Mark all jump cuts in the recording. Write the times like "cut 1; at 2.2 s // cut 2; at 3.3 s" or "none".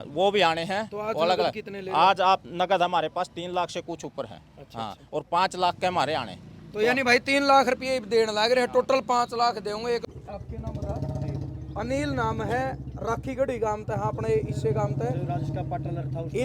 cut 1; at 10.0 s

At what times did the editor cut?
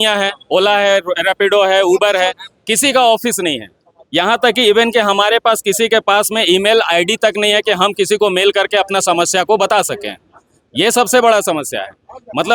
none

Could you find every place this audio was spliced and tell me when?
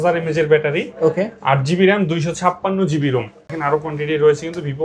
cut 1; at 3.5 s

